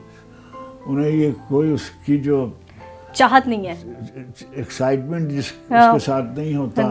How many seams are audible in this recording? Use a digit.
0